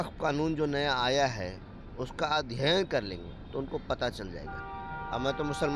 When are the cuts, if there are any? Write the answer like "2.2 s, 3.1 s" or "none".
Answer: none